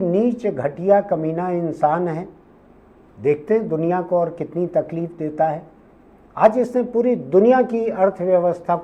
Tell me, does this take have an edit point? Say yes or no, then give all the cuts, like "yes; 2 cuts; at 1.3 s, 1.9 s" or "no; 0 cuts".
no; 0 cuts